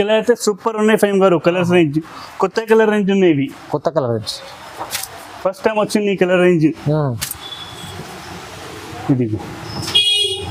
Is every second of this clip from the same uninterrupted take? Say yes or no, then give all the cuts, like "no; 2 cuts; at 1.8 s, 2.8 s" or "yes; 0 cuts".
yes; 0 cuts